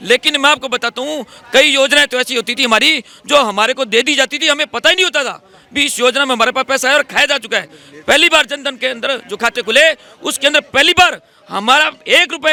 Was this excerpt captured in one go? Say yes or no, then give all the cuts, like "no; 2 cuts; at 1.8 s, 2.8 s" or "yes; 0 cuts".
yes; 0 cuts